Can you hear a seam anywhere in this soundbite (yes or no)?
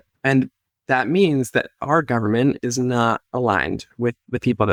no